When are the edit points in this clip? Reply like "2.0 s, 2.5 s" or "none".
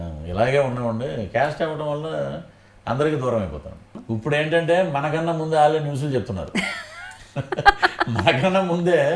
4.0 s